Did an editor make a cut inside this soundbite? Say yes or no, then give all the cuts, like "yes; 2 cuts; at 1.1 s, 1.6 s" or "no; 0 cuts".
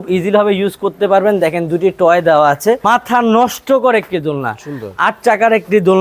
yes; 1 cut; at 2.8 s